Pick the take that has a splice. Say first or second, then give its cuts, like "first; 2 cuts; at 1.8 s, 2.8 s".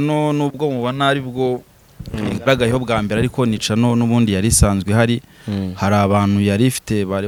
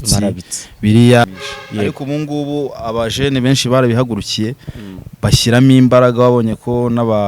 second; 1 cut; at 1.2 s